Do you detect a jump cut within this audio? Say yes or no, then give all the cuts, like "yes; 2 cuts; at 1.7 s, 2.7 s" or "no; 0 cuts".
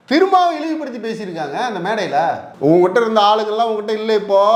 no; 0 cuts